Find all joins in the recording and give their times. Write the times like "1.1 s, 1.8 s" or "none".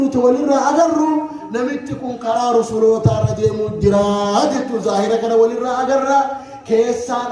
none